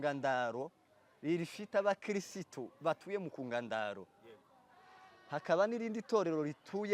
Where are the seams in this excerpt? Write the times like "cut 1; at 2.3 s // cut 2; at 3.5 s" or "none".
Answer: none